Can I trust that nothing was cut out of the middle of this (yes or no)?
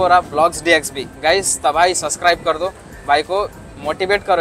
yes